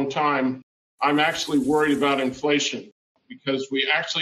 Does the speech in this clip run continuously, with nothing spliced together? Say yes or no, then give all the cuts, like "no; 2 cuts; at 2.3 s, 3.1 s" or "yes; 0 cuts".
no; 1 cut; at 3.2 s